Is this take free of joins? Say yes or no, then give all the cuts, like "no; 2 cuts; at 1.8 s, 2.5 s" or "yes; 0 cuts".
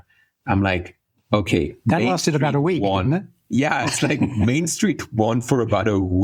yes; 0 cuts